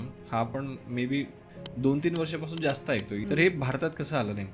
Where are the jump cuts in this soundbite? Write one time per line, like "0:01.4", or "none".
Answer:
0:01.5
0:03.1